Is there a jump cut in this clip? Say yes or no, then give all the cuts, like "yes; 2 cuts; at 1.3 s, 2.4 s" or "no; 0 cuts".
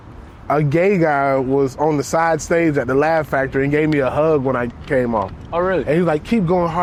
no; 0 cuts